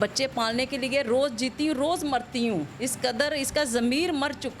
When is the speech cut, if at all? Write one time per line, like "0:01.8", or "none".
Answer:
0:02.8